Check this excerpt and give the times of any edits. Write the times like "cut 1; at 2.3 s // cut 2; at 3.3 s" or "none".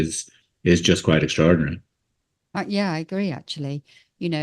none